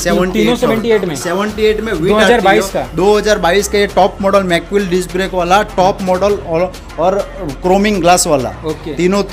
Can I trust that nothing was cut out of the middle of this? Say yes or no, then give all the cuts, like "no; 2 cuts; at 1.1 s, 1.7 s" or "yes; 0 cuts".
yes; 0 cuts